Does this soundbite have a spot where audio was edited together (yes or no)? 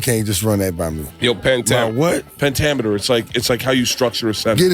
no